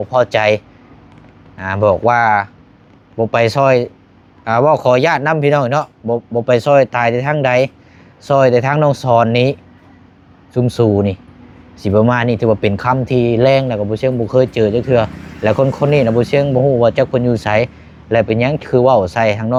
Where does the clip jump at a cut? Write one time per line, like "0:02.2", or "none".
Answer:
none